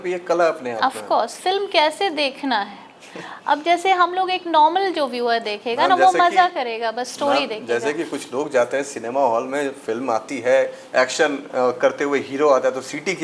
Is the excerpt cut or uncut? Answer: uncut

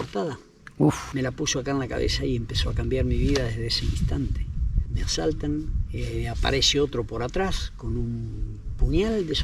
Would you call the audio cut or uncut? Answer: uncut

